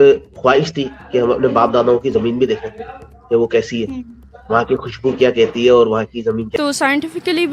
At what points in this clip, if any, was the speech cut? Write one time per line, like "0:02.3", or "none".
0:06.5